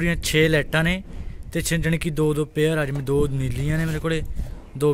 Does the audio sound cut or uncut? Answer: uncut